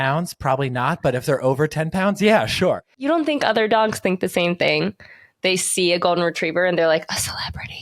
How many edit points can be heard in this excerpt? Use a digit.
1